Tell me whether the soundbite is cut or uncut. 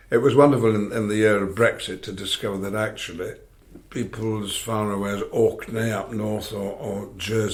uncut